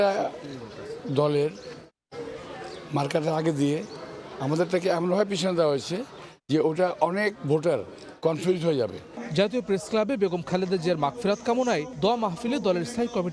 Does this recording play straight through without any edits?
yes; 0 cuts

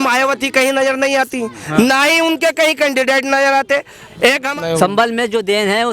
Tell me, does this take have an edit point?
yes; 1 cut; at 4.5 s

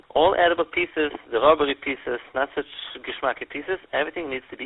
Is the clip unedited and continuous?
yes; 0 cuts

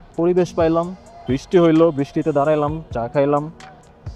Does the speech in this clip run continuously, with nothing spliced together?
yes; 0 cuts

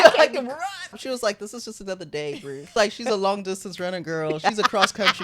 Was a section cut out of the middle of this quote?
yes; 2 cuts; at 1.0 s, 2.6 s

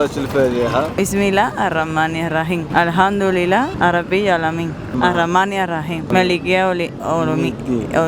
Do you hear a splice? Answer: no; 0 cuts

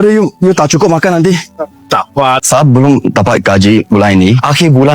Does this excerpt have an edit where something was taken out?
yes; 1 cut; at 2.4 s

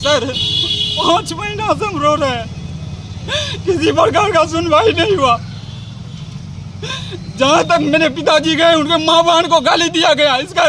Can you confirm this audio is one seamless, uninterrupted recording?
yes; 0 cuts

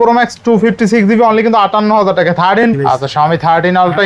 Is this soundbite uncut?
no; 1 cut; at 2.6 s

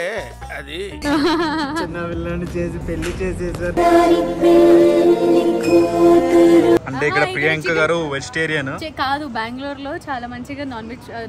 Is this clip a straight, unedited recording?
no; 2 cuts; at 1.0 s, 6.8 s

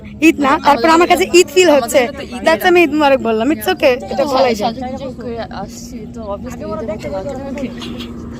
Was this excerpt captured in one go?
yes; 0 cuts

